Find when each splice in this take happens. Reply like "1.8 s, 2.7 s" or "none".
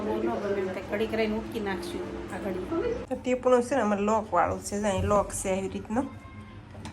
3.0 s